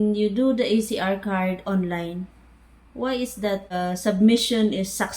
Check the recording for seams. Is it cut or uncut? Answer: cut